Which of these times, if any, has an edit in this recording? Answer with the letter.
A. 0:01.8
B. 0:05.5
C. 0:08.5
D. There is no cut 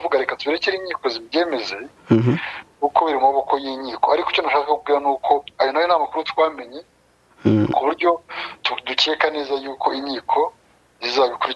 D